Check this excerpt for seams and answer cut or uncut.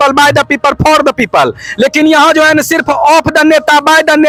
uncut